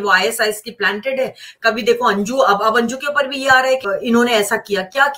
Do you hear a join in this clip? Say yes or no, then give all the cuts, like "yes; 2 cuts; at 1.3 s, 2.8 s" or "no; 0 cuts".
yes; 1 cut; at 3.9 s